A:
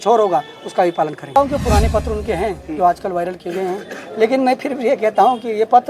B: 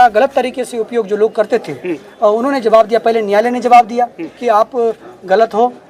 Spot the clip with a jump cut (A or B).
A